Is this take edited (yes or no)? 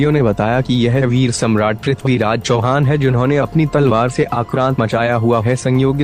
yes